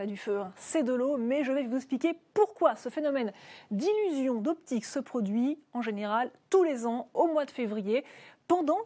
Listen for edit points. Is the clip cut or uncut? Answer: uncut